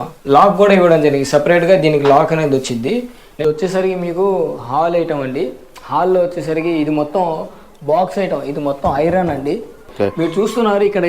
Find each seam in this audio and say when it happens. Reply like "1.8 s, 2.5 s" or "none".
3.2 s, 9.9 s